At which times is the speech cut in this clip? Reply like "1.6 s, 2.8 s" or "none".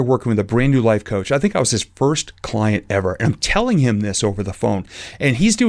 none